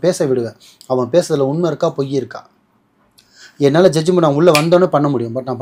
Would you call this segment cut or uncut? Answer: uncut